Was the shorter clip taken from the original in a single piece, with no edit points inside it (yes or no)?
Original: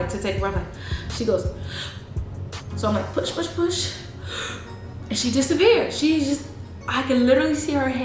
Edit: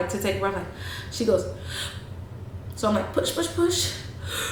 yes